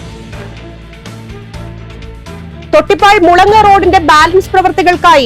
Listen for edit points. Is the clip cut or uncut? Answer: cut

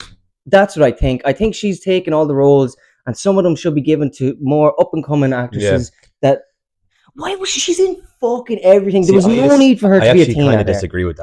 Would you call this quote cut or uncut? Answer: uncut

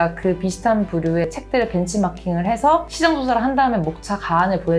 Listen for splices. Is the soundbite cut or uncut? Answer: cut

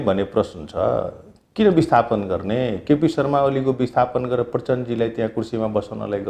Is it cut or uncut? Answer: uncut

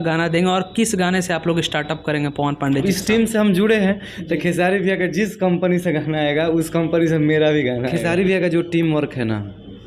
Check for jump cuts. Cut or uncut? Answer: cut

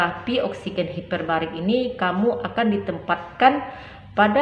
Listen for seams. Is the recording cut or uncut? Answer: uncut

